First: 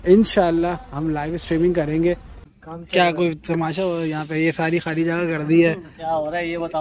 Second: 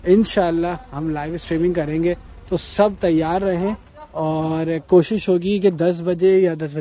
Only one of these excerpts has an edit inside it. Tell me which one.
first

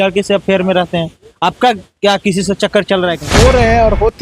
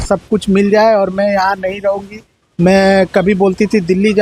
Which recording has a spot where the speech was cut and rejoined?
first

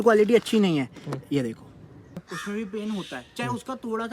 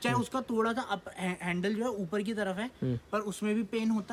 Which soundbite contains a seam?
first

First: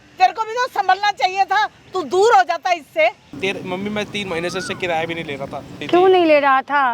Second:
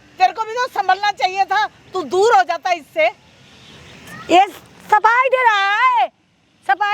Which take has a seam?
first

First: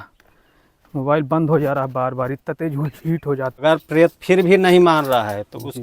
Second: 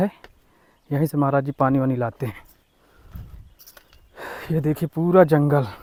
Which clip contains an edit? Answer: first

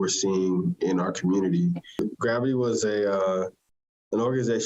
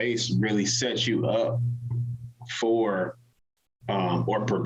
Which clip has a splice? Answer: first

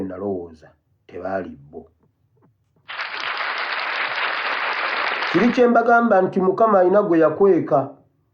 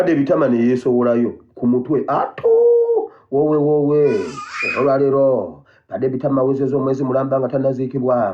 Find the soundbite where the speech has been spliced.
first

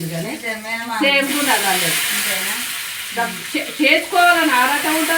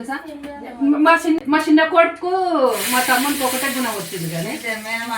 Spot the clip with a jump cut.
second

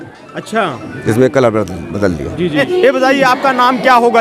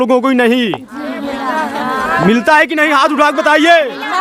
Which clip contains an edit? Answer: first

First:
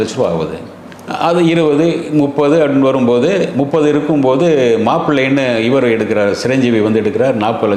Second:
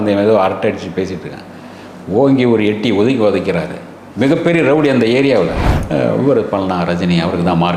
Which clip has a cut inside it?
second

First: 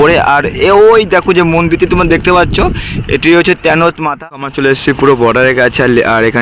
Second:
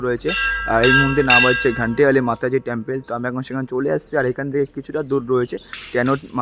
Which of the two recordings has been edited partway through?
first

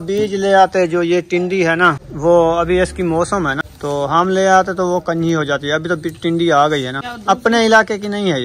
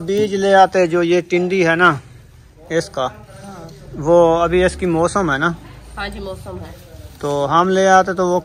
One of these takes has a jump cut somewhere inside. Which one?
first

